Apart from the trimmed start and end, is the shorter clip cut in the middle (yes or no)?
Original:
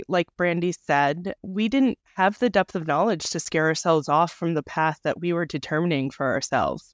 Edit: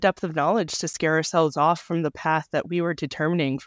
no